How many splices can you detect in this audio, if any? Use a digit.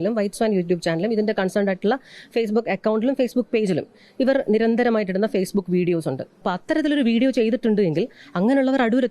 1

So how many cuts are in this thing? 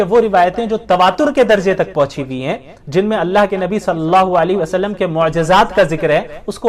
0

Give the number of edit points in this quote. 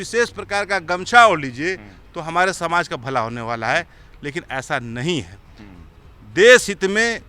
0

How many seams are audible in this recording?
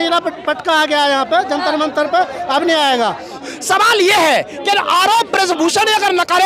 1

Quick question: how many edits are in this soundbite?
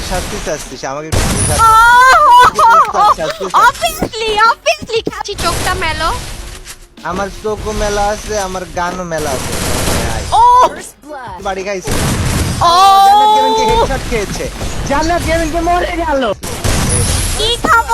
3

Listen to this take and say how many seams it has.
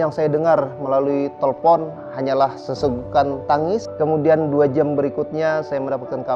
1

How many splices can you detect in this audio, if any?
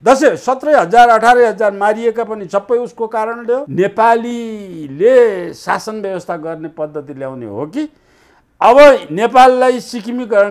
1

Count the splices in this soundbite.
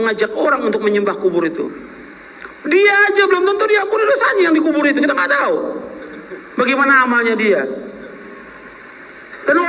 0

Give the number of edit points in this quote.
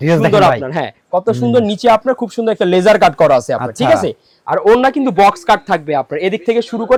0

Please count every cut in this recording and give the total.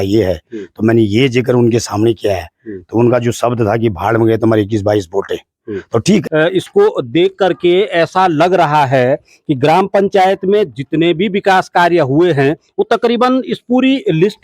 1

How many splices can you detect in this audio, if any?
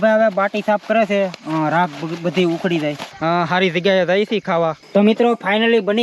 2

